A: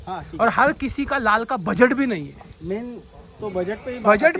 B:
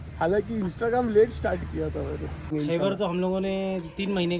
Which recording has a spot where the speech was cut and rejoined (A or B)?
B